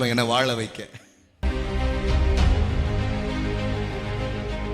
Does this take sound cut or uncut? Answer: cut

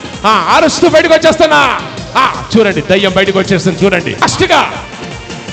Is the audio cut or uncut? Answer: cut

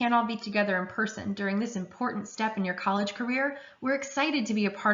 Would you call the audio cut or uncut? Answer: cut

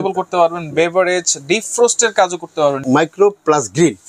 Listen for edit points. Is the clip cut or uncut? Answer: cut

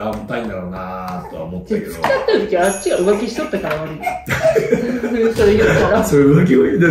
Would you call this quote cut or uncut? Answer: uncut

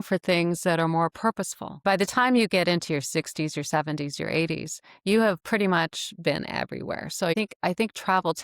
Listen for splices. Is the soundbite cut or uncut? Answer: cut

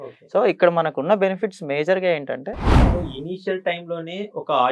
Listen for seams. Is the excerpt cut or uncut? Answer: cut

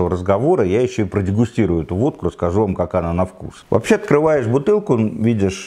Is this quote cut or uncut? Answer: uncut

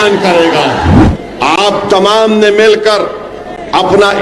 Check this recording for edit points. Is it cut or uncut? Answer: cut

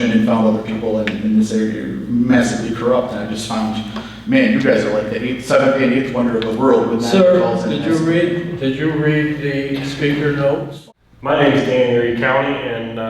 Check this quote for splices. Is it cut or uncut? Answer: cut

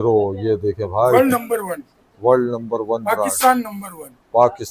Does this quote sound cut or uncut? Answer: uncut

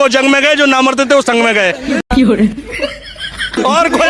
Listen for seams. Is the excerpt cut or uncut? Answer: uncut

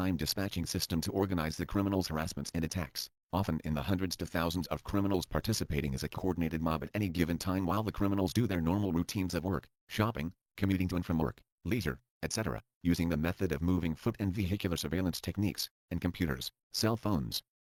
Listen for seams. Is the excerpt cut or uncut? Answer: uncut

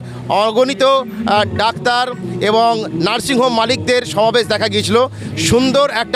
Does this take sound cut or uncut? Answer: uncut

